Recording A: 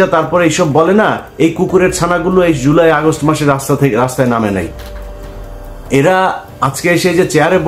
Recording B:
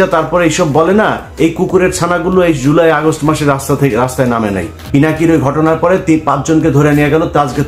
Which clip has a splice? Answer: B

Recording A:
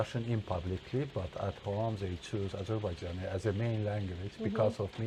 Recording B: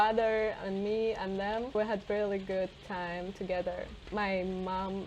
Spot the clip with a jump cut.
B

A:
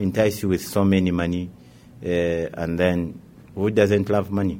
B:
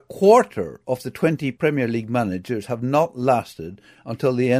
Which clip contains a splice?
A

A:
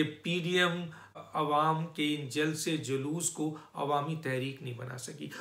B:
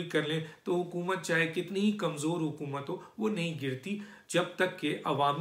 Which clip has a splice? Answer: A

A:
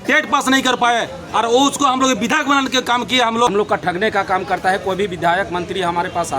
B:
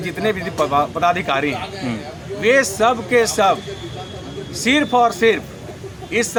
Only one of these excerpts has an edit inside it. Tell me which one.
A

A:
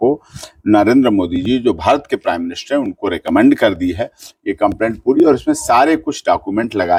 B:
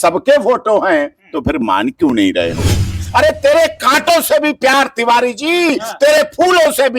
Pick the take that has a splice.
B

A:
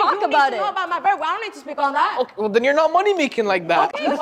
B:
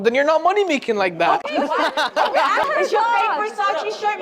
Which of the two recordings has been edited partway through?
B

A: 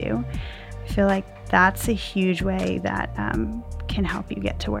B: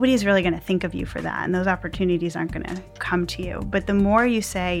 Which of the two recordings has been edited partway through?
B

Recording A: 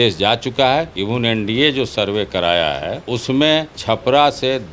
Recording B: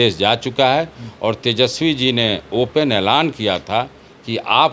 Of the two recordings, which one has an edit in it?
A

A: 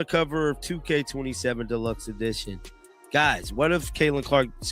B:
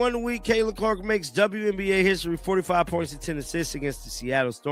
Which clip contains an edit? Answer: A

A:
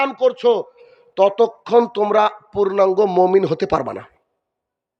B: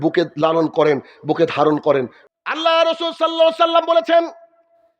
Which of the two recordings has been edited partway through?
B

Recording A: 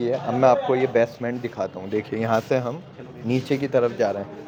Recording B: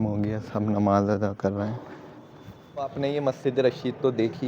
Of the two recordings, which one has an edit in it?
B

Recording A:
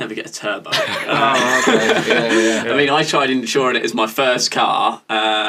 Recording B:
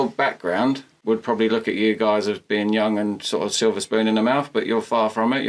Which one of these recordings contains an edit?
B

